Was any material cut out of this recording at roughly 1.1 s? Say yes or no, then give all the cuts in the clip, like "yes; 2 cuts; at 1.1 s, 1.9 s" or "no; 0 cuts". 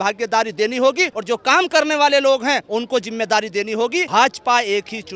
yes; 3 cuts; at 1.1 s, 2.6 s, 4.1 s